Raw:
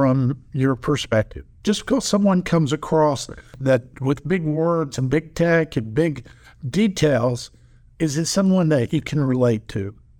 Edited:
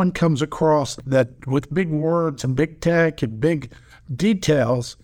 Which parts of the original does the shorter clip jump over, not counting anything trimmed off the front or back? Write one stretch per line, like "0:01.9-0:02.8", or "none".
0:03.3-0:03.5